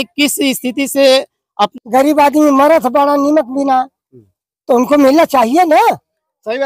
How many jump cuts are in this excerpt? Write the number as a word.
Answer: one